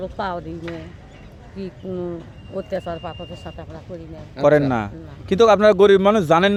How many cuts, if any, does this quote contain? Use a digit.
0